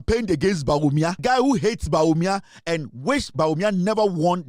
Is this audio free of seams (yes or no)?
no